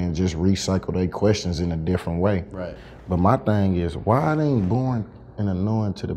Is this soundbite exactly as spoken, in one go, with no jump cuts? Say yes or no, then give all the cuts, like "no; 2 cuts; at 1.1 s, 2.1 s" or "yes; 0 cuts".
no; 1 cut; at 2.8 s